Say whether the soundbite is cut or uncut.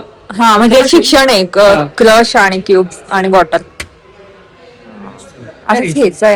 uncut